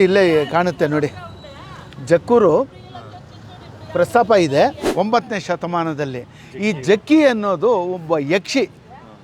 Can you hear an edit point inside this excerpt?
yes; 1 cut; at 4.9 s

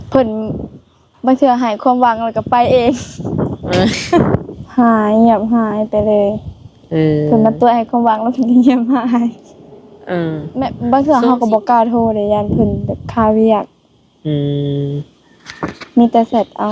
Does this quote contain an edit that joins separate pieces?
yes; 2 cuts; at 4.6 s, 10.7 s

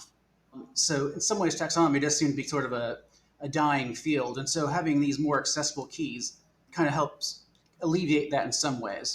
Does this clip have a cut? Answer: no; 0 cuts

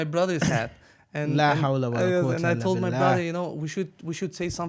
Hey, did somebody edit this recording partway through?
no; 0 cuts

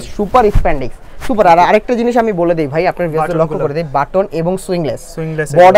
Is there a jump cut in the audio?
no; 0 cuts

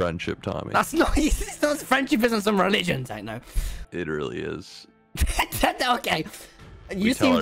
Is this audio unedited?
yes; 0 cuts

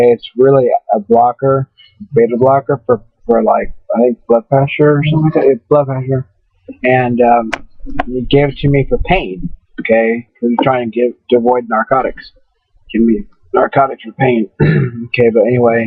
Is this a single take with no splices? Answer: no; 1 cut; at 12.1 s

